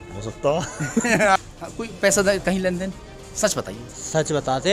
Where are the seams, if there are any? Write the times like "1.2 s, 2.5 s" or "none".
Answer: 1.4 s